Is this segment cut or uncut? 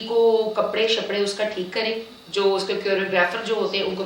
uncut